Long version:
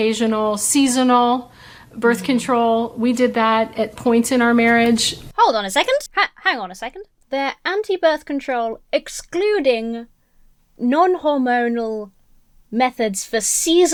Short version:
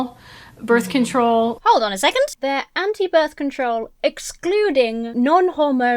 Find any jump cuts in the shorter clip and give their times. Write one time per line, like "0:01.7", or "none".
0:01.6
0:02.3
0:05.0